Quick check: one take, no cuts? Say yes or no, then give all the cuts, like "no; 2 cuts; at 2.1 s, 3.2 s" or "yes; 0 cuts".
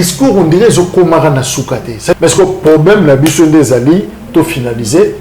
no; 1 cut; at 2.1 s